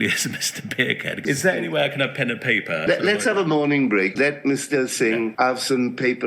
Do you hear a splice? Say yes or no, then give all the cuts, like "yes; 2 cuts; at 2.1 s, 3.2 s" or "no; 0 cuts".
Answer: yes; 4 cuts; at 1.2 s, 2.9 s, 4.1 s, 5.3 s